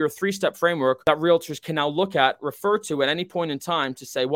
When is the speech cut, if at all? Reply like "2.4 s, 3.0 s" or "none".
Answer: 1.0 s